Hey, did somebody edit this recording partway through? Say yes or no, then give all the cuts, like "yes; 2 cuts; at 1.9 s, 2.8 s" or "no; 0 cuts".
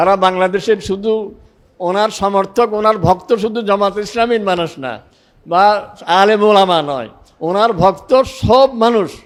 no; 0 cuts